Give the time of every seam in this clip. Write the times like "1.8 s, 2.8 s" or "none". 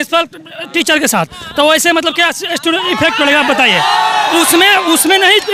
none